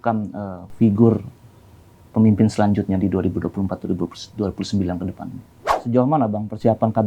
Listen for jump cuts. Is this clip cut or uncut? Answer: cut